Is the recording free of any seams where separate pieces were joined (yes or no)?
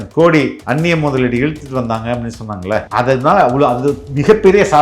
no